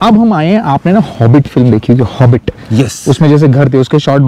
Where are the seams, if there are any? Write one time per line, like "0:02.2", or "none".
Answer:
none